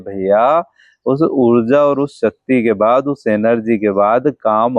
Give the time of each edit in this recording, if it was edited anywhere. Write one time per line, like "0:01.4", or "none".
none